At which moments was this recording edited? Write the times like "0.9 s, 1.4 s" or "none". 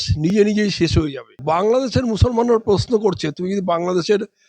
1.3 s